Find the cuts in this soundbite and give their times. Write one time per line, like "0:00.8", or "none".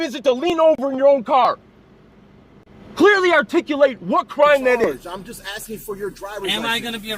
0:05.1